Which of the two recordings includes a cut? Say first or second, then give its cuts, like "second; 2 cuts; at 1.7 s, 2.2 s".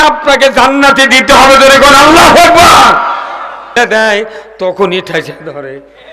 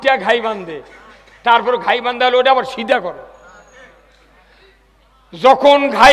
first; 1 cut; at 3.7 s